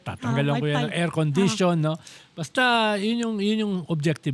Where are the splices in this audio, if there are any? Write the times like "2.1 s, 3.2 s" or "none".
none